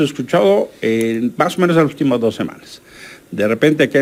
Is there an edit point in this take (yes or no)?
no